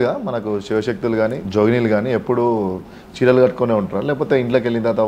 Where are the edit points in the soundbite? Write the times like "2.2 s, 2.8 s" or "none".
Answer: 1.4 s